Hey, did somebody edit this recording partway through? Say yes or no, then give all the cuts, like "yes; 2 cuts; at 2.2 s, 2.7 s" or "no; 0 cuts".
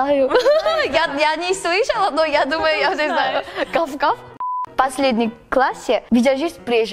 yes; 1 cut; at 4.6 s